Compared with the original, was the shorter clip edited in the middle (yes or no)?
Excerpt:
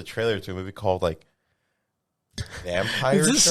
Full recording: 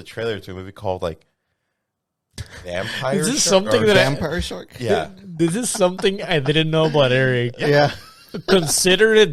no